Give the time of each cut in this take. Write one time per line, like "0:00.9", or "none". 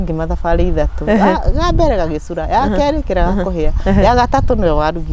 none